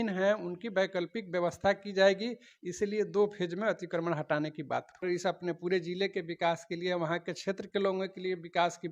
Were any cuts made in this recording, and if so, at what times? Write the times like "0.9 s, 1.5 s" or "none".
5.0 s